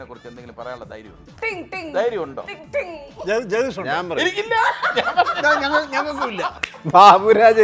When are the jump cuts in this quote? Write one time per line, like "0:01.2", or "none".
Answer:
0:06.6